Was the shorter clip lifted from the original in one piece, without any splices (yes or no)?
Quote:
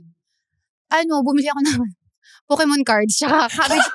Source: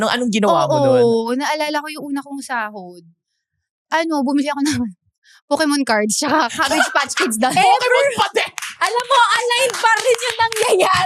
yes